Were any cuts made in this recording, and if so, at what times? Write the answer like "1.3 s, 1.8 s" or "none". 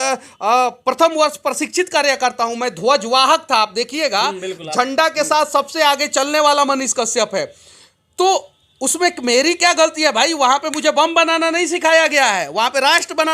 none